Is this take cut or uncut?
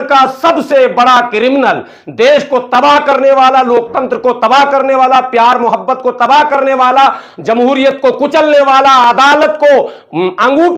uncut